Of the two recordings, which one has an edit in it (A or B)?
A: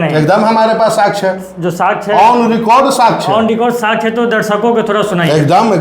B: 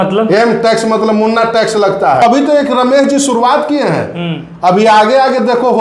B